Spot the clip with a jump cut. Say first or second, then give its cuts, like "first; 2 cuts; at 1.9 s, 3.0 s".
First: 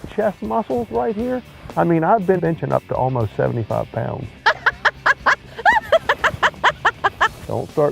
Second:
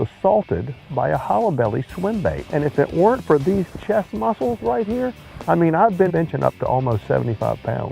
second; 1 cut; at 2.4 s